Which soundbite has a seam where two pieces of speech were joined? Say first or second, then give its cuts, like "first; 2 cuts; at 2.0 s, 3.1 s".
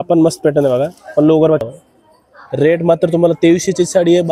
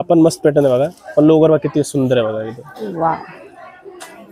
first; 1 cut; at 1.7 s